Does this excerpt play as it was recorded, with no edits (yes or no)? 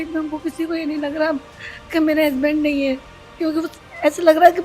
yes